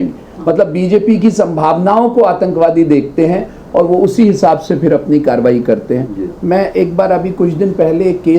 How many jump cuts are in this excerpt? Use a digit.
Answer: 1